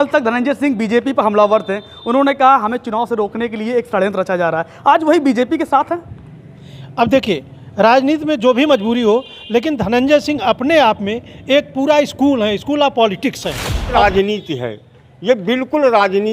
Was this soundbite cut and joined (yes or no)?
yes